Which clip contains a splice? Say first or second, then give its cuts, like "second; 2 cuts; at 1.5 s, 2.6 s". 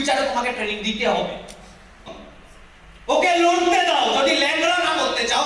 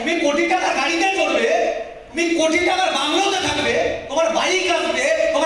first; 1 cut; at 2.1 s